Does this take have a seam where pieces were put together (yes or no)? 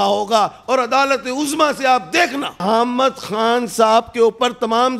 yes